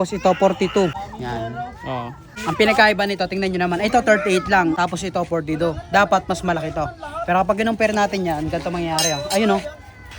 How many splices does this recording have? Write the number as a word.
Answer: three